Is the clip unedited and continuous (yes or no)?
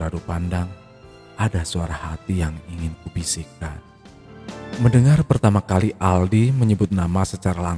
no